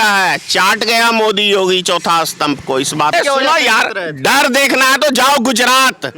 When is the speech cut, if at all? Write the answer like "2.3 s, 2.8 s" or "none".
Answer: 3.1 s

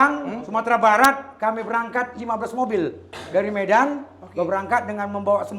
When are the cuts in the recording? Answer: none

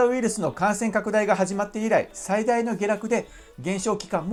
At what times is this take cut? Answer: none

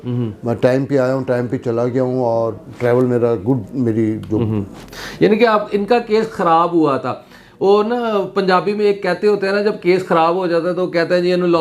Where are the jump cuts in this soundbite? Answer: none

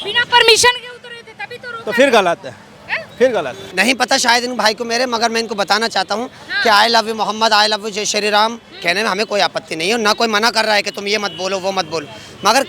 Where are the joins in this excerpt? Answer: 3.6 s

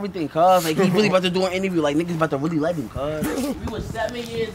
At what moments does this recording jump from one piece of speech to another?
3.5 s

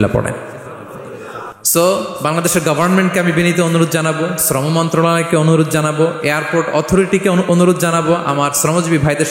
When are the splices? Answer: 1.5 s

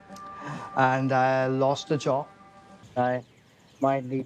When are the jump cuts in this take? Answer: 2.8 s

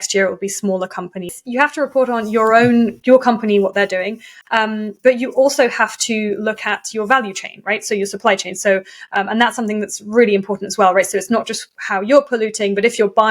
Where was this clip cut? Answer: 1.3 s

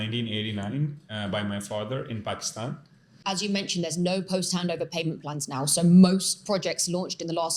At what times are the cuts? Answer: 3.2 s

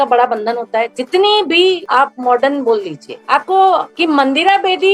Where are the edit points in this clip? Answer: 3.9 s

